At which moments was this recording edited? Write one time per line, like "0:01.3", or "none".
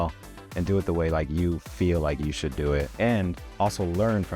0:02.9